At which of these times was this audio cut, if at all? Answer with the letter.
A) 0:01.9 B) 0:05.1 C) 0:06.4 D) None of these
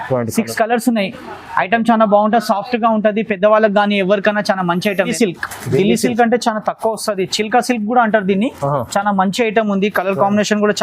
B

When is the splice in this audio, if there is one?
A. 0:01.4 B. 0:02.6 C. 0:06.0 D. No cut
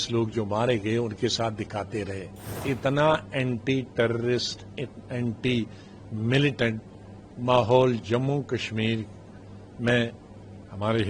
B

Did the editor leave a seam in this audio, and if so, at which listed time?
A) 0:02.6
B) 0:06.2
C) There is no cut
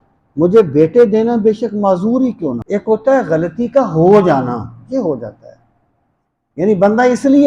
A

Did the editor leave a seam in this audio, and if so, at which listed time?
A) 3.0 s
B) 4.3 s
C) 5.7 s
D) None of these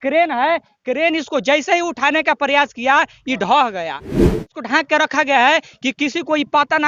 B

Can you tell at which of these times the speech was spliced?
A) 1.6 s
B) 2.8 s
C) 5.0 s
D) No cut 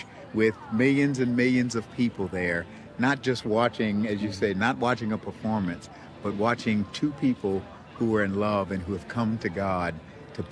D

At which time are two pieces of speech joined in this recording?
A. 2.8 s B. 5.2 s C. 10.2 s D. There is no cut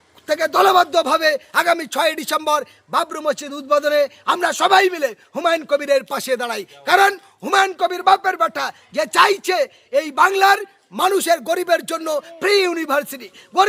D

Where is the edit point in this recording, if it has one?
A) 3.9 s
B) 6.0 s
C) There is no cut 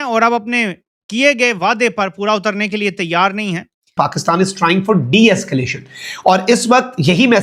A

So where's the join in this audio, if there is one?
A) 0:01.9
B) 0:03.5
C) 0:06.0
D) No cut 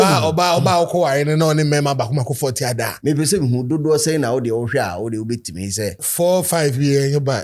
C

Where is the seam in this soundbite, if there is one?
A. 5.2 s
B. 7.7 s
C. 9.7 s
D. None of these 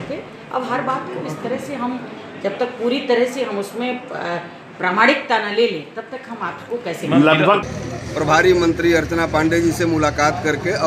B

